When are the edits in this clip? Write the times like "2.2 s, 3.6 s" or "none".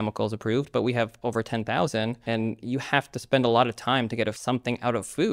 2.2 s, 4.4 s